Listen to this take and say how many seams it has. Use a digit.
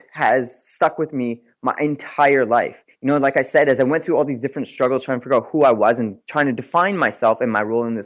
0